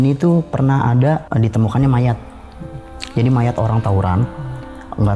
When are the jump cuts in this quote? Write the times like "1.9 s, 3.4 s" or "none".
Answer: 1.3 s

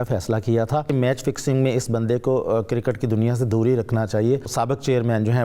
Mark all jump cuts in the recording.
0.9 s, 4.5 s

